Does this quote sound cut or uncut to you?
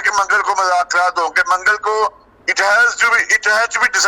uncut